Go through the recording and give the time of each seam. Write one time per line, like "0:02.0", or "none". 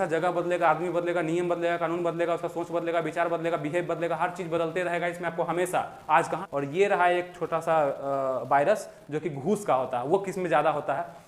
0:06.4